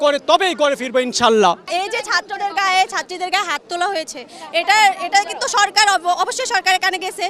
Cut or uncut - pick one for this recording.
uncut